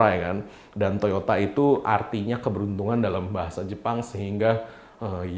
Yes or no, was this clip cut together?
no